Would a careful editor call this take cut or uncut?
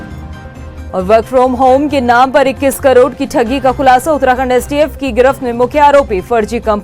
uncut